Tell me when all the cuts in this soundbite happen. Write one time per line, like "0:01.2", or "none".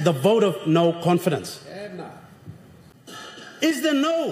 0:03.1